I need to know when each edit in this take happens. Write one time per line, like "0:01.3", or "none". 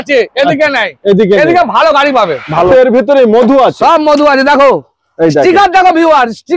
0:02.7